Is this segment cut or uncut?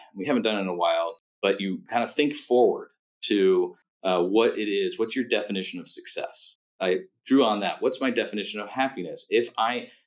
cut